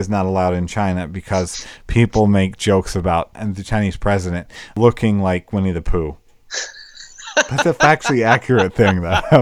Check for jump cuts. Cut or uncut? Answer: cut